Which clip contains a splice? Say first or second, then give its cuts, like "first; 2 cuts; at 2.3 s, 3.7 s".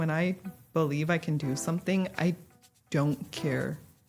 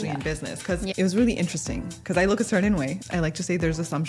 second; 2 cuts; at 0.9 s, 3.0 s